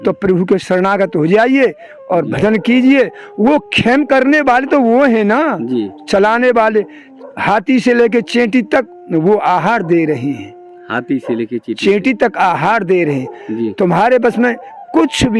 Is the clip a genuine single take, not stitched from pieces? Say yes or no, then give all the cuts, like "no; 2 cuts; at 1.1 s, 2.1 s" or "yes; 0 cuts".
yes; 0 cuts